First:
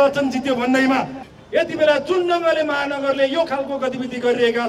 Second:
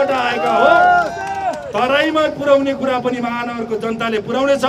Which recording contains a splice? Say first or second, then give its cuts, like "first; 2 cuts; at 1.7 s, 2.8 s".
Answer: first; 1 cut; at 1.2 s